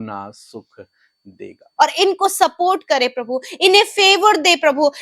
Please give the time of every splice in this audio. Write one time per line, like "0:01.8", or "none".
0:01.6